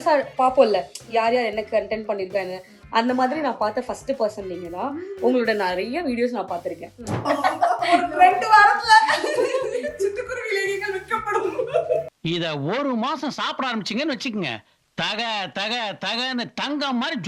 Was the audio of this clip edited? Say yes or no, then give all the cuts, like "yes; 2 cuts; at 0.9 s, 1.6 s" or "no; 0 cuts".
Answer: yes; 2 cuts; at 7.2 s, 12.1 s